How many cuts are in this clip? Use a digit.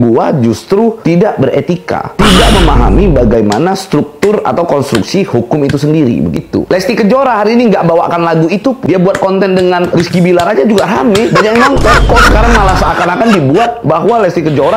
2